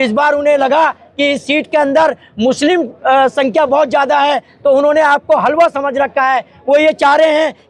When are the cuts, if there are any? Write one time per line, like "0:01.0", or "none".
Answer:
none